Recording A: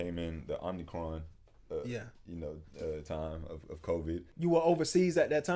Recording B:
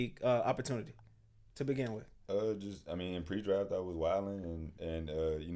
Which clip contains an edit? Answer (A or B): A